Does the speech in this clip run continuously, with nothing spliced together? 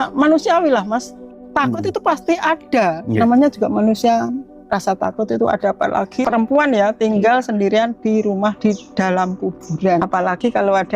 no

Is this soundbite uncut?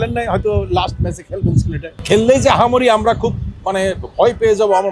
no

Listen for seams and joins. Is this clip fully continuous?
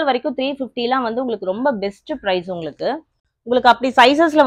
yes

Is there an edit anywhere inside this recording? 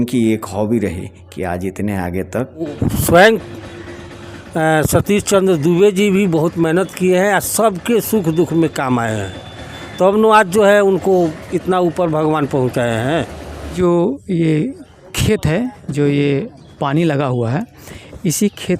yes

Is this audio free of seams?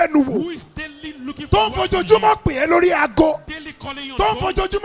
yes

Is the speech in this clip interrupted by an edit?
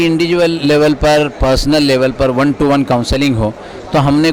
no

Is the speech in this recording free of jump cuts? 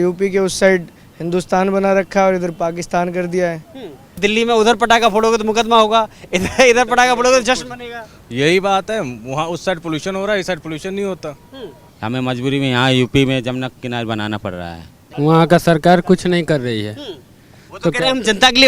no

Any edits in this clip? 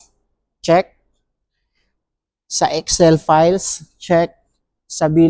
no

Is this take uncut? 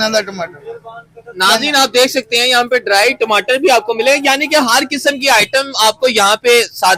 yes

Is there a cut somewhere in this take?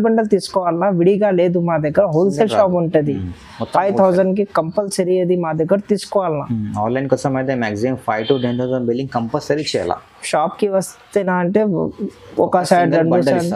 no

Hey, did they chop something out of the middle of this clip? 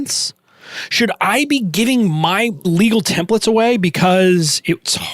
yes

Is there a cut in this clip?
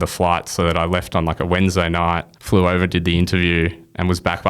yes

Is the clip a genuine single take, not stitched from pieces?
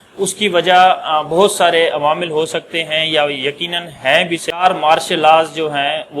no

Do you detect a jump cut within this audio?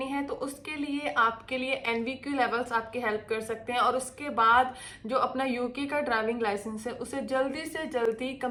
no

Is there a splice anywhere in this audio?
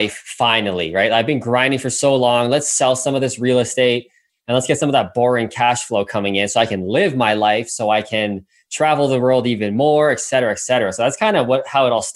no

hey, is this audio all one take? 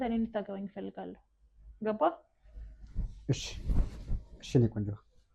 yes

